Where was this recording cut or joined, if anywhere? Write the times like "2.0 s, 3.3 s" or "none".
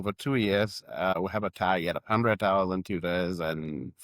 1.2 s